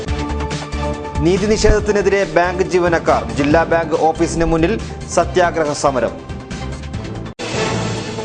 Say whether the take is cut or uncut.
cut